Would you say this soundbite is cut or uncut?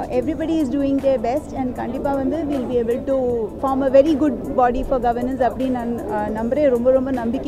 cut